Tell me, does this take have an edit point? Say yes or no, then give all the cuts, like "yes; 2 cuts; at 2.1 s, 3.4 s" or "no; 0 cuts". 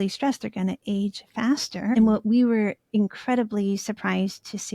yes; 1 cut; at 1.9 s